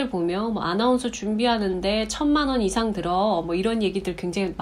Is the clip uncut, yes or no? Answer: yes